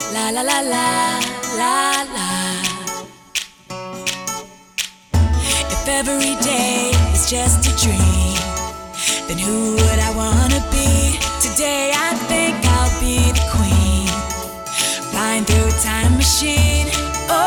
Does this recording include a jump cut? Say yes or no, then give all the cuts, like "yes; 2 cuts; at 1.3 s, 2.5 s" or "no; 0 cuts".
no; 0 cuts